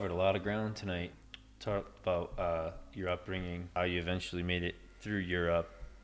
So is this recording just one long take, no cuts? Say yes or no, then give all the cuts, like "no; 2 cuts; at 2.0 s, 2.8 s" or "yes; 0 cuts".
no; 2 cuts; at 1.1 s, 3.8 s